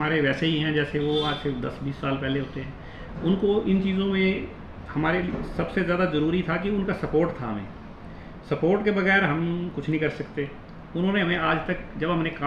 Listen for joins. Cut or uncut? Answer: uncut